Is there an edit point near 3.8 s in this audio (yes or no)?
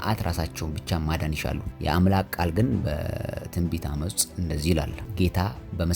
no